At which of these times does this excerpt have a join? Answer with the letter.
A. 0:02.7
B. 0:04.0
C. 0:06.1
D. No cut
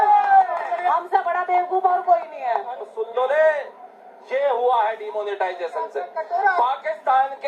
A